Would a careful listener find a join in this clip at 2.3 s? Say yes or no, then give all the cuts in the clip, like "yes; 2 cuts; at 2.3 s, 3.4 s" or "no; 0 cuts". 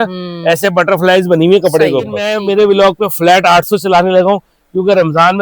yes; 1 cut; at 2.3 s